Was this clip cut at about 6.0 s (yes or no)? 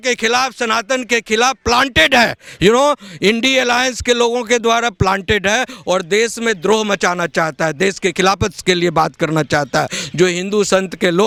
no